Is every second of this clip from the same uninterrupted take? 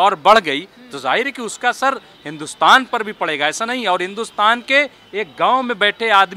yes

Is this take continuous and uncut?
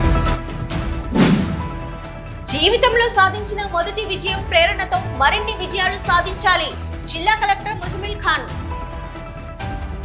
yes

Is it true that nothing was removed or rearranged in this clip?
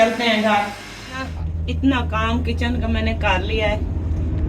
no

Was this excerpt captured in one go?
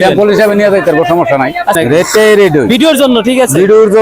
yes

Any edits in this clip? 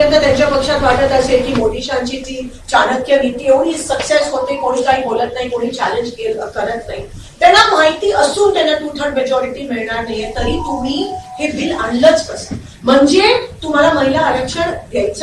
no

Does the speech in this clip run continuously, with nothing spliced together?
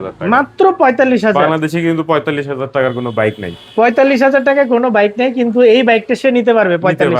yes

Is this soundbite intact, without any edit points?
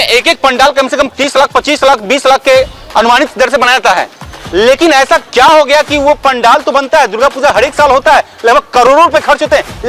yes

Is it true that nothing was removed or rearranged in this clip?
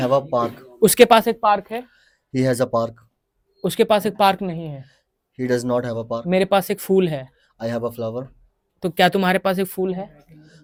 yes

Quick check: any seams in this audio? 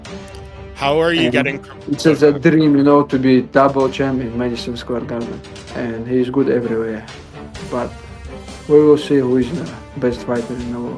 yes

